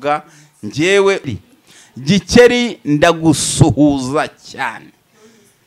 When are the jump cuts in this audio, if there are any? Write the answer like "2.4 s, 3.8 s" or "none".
1.2 s